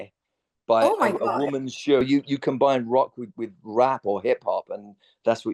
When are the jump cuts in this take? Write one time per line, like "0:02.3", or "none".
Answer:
0:02.0